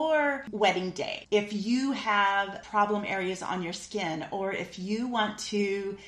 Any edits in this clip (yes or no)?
yes